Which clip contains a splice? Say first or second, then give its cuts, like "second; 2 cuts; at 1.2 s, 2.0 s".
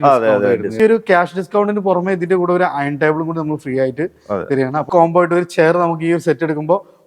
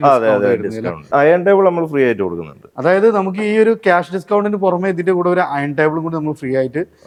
first; 2 cuts; at 0.8 s, 4.9 s